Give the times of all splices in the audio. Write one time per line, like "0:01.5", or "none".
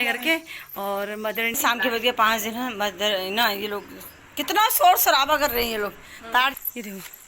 0:01.6
0:06.5